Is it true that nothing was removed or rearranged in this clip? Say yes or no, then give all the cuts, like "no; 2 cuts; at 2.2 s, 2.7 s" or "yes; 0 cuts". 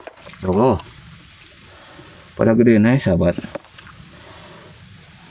yes; 0 cuts